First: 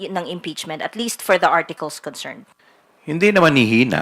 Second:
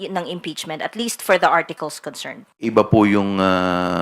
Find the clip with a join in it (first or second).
second